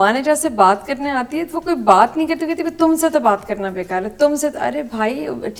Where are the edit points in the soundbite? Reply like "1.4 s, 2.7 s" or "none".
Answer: none

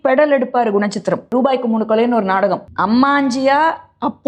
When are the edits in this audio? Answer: 1.3 s, 2.7 s

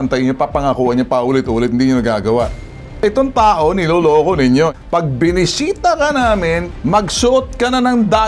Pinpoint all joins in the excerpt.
3.0 s, 4.7 s, 6.7 s

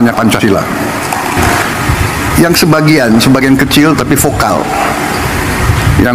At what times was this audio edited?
1.4 s

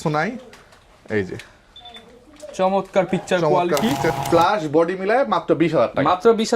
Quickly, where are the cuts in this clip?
4.1 s

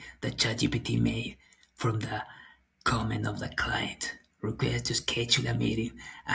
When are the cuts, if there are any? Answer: none

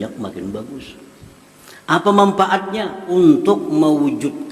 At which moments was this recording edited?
3.1 s

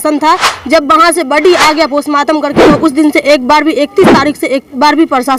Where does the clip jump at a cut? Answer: none

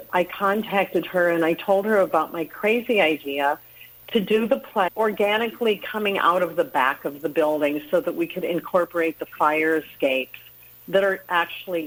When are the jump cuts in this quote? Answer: none

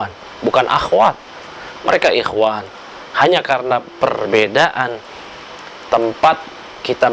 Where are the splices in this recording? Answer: none

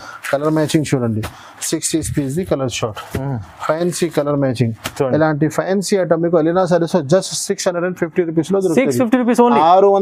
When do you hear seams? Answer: none

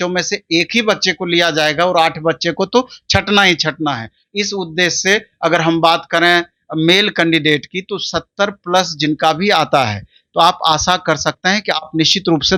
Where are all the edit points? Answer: none

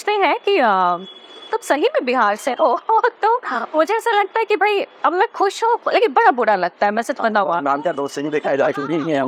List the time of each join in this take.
none

